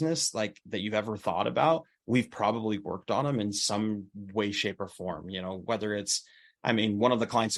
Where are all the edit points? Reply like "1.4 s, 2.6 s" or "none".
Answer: none